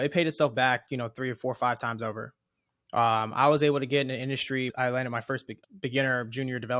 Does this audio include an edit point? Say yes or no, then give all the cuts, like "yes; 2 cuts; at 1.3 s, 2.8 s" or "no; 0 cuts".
yes; 2 cuts; at 4.7 s, 5.5 s